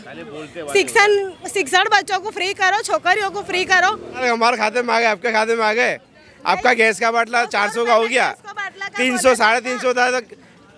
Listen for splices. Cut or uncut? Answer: cut